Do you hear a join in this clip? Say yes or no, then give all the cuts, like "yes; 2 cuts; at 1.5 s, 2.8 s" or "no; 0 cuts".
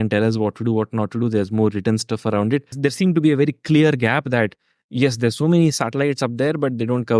yes; 1 cut; at 2.7 s